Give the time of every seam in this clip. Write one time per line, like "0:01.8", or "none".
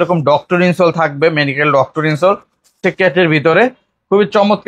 0:02.8